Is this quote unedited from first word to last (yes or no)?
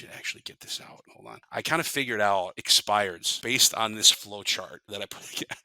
no